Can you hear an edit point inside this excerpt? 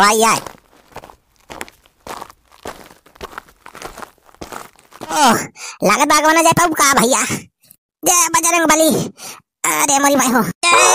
yes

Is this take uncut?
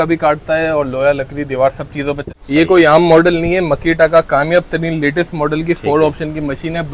no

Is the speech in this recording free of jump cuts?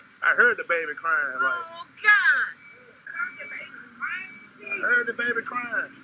no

